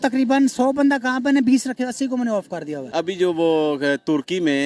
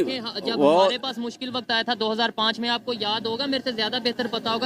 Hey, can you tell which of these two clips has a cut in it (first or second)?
first